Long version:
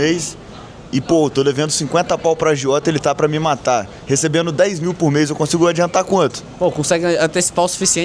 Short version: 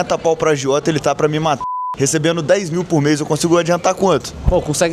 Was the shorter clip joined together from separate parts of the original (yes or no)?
yes